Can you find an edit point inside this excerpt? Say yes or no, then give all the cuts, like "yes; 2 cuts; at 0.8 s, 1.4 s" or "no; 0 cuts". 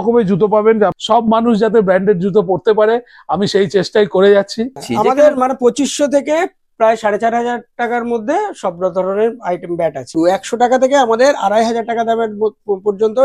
yes; 3 cuts; at 1.0 s, 4.8 s, 10.2 s